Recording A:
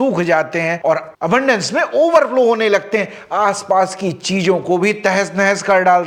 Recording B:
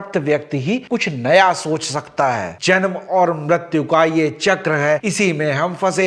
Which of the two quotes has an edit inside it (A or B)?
B